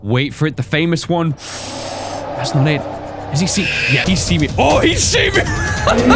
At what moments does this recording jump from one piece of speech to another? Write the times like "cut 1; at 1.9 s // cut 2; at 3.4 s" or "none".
none